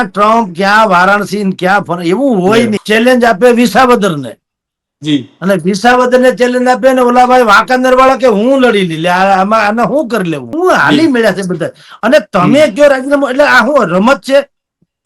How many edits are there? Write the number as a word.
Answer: two